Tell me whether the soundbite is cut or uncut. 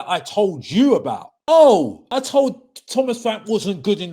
cut